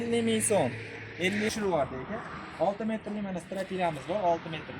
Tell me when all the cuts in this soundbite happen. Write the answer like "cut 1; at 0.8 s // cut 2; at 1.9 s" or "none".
cut 1; at 1.5 s